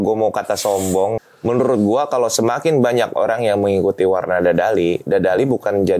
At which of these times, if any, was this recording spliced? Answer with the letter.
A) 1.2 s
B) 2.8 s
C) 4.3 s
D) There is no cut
A